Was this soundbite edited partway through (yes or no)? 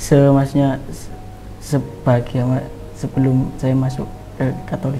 no